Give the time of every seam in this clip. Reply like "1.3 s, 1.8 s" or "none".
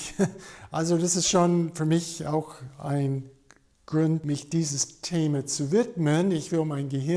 4.2 s